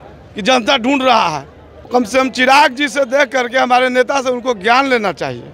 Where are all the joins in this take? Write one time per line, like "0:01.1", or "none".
0:01.9